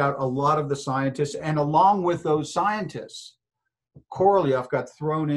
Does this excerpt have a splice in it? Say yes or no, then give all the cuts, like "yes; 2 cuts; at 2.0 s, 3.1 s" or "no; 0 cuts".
no; 0 cuts